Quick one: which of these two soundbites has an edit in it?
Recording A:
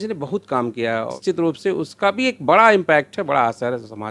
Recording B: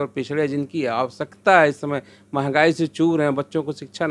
A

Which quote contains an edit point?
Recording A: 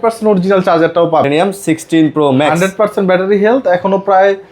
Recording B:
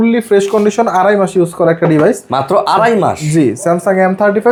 A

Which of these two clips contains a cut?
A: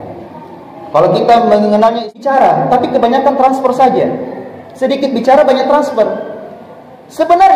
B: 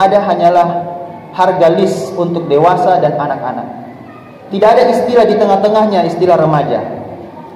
A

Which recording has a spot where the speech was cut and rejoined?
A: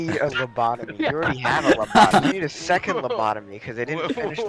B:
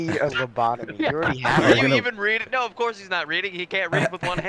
B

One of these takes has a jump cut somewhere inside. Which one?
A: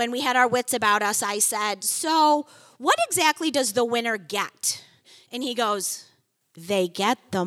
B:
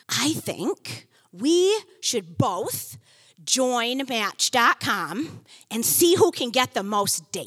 A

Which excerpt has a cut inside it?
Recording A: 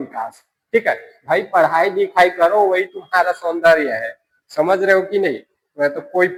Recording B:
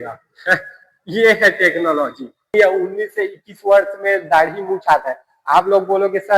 B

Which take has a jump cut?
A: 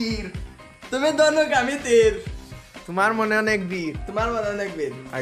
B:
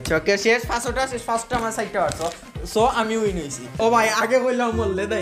B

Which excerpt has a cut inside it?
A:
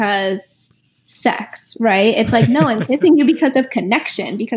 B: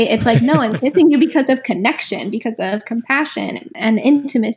B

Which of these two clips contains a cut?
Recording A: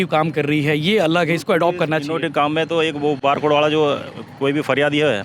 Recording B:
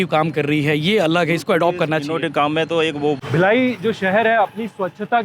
B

